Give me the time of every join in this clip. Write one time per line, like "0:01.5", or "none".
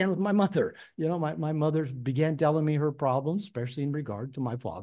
none

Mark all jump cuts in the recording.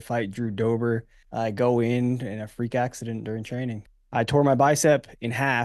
0:01.2
0:03.9

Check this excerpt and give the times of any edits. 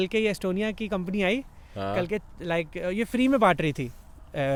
none

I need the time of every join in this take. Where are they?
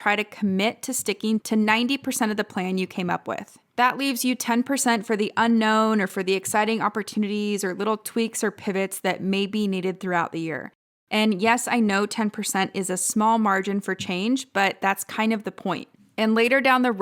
0:01.4
0:03.6

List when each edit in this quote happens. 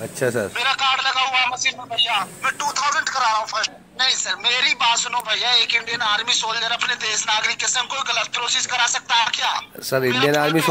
0:03.7

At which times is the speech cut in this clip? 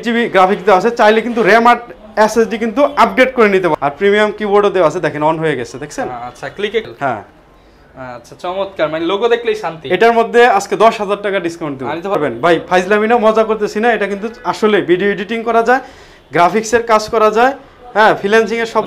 0:03.7
0:06.9
0:12.2

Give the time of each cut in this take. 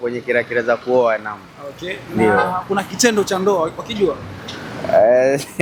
none

